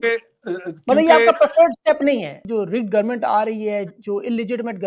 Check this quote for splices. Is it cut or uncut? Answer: cut